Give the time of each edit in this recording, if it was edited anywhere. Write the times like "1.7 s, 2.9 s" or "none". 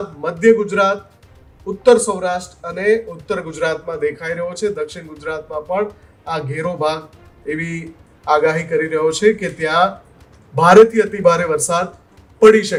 none

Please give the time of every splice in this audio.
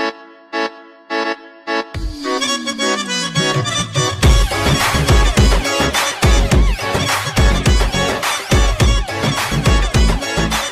none

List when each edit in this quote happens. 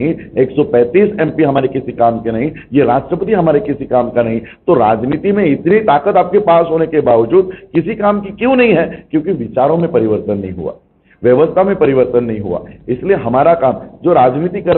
none

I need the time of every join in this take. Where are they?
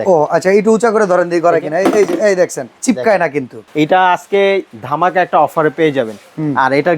2.7 s, 3.6 s, 4.8 s

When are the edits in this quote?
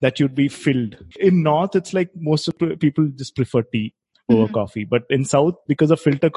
1.0 s, 2.5 s

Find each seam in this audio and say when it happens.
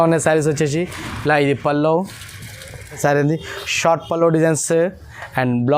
3.0 s

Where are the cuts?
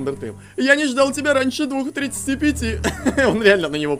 none

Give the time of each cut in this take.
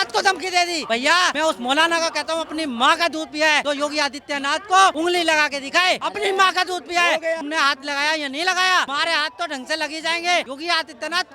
1.1 s, 3.6 s, 5.0 s, 6.1 s, 7.4 s, 8.9 s, 10.5 s

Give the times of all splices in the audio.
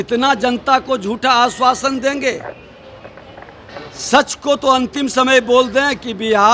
none

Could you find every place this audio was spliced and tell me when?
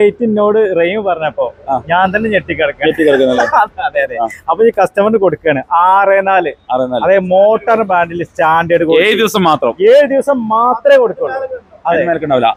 none

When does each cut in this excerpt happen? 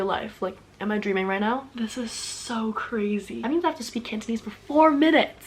1.7 s, 3.4 s

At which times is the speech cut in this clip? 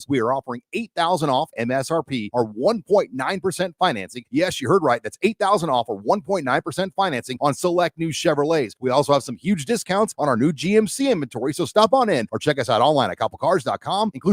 none

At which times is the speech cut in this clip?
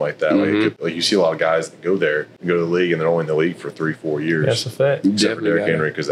0.8 s, 2.3 s

